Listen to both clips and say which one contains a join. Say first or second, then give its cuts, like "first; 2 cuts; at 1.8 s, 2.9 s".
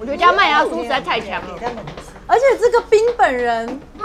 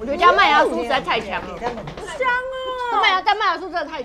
first; 1 cut; at 2.0 s